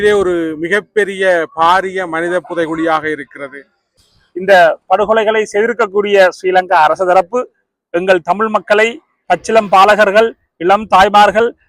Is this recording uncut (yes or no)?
no